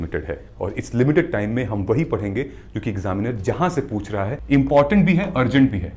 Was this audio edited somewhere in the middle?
yes; 1 cut; at 4.4 s

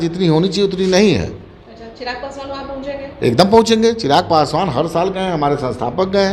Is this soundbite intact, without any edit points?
yes; 0 cuts

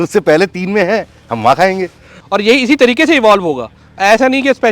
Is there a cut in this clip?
no; 0 cuts

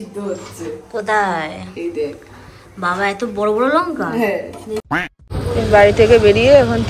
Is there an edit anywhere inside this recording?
yes; 1 cut; at 4.8 s

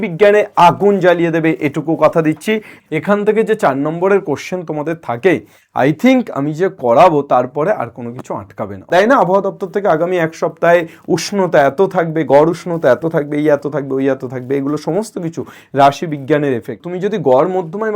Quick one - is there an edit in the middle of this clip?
yes; 3 cuts; at 2.7 s, 8.9 s, 16.8 s

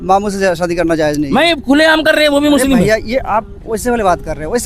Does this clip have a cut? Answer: no; 0 cuts

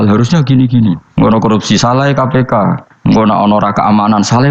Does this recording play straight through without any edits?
no; 2 cuts; at 1.0 s, 2.9 s

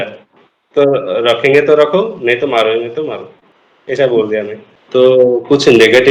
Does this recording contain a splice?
yes; 1 cut; at 4.7 s

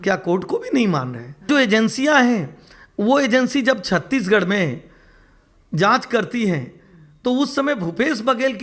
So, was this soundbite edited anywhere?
yes; 1 cut; at 1.5 s

